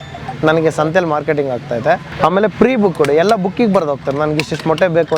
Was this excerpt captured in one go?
no; 1 cut; at 2.1 s

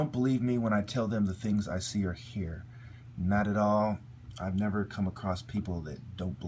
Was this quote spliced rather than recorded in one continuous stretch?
no; 0 cuts

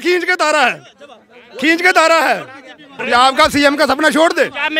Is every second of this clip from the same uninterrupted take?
no; 1 cut; at 3.0 s

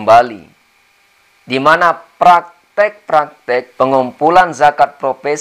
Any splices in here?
yes; 1 cut; at 3.7 s

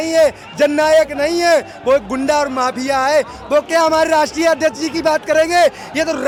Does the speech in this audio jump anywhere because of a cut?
no; 0 cuts

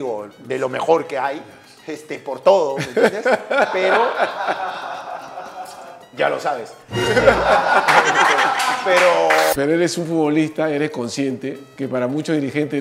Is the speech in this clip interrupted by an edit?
yes; 2 cuts; at 9.5 s, 11.6 s

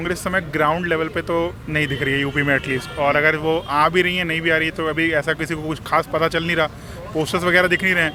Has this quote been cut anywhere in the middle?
no; 0 cuts

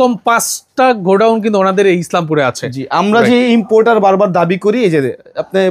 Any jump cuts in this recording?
no; 0 cuts

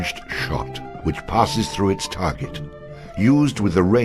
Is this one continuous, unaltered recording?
yes; 0 cuts

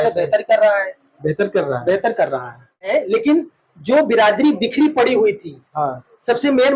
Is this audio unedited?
no; 1 cut; at 2.9 s

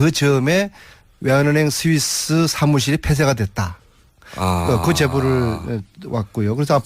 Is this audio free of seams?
no; 1 cut; at 3.7 s

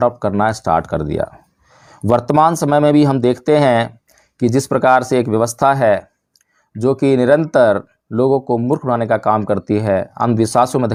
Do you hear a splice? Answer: no; 0 cuts

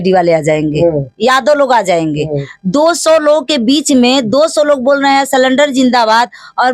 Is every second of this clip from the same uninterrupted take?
no; 1 cut; at 2.5 s

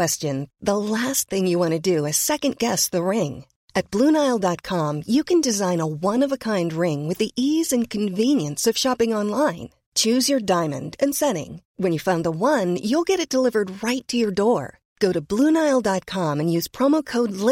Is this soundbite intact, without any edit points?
yes; 0 cuts

